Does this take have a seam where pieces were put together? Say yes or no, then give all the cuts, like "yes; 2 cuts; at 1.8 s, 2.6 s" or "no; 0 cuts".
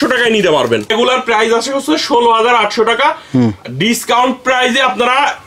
yes; 1 cut; at 0.9 s